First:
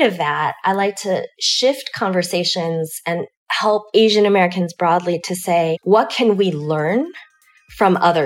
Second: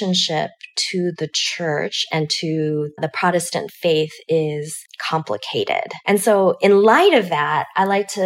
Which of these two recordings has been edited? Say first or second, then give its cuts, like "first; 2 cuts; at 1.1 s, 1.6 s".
second; 1 cut; at 3.0 s